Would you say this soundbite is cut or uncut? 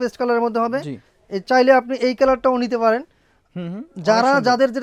uncut